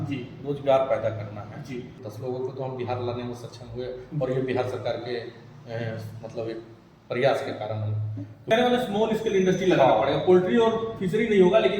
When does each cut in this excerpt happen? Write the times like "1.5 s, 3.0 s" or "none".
2.0 s, 8.5 s

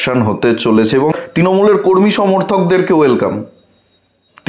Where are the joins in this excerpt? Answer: 1.1 s

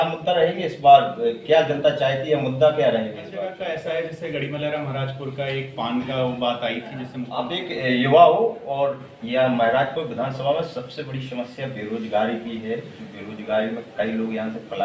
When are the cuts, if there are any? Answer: 3.4 s, 7.4 s

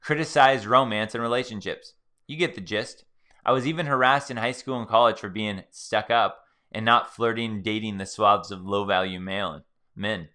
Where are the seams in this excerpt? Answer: none

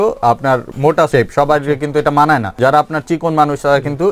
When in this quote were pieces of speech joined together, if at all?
0.9 s, 2.5 s

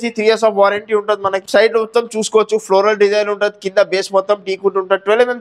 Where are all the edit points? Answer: 1.4 s

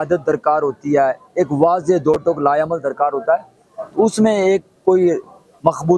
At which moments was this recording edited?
none

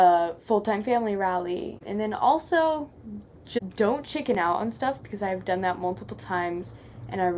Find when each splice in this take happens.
1.8 s, 3.6 s

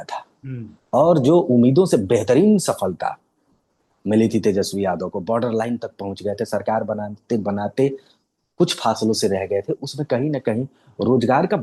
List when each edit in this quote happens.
none

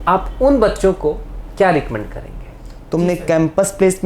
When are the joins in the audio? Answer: 2.8 s

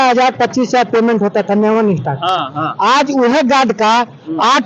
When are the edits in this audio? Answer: none

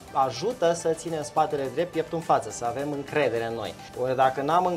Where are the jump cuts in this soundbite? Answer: 3.8 s

